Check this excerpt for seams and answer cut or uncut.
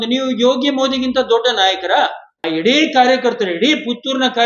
cut